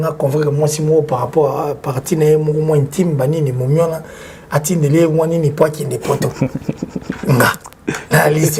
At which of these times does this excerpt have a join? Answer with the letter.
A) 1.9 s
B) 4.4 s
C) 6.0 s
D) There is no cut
D